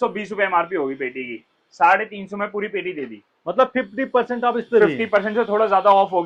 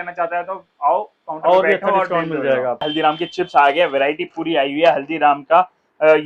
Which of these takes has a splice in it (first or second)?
second